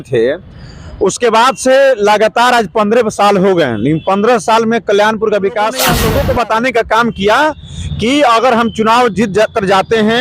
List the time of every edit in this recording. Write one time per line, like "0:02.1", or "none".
0:05.9